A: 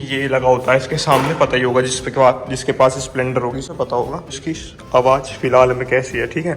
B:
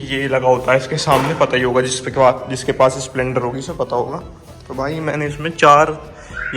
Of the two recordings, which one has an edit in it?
A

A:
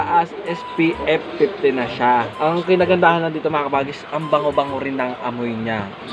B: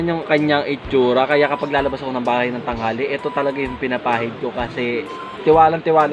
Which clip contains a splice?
A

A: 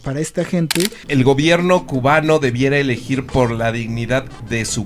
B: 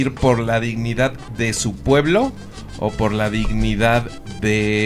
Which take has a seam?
A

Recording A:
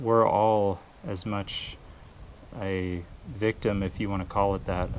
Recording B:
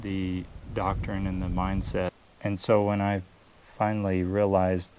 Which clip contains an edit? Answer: B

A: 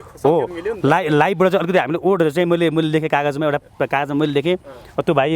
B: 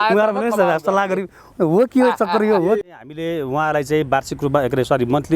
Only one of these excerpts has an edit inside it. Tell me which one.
B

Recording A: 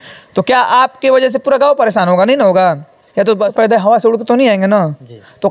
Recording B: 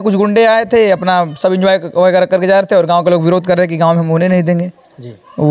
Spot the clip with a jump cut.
A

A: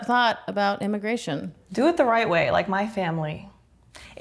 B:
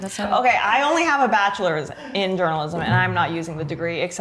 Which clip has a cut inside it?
A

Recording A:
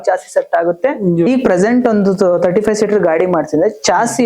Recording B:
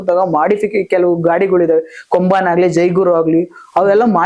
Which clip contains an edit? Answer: A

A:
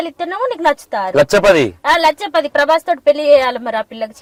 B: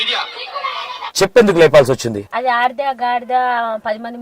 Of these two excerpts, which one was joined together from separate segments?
B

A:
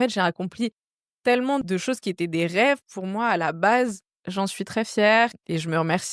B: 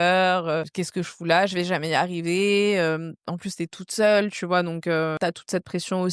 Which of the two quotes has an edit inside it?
A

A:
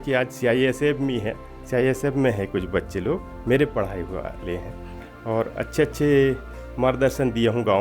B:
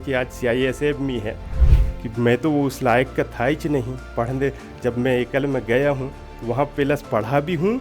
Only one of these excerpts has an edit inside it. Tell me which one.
B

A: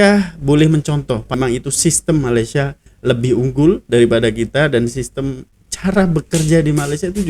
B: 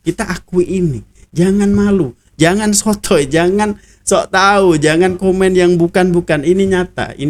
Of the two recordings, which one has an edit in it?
A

